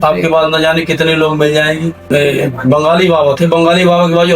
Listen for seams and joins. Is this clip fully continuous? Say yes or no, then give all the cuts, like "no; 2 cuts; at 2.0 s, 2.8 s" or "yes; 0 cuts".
no; 1 cut; at 2.1 s